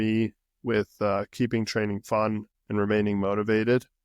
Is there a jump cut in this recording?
yes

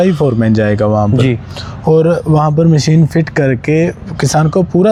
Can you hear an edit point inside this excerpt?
no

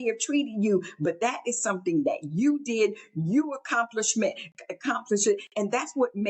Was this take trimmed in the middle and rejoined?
no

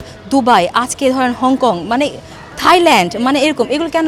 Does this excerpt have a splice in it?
no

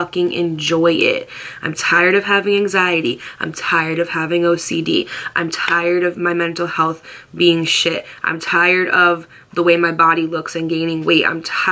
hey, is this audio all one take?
yes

